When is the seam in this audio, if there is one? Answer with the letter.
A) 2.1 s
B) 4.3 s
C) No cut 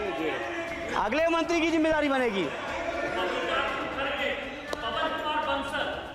C